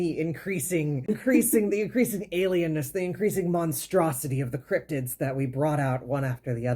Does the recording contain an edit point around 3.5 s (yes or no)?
no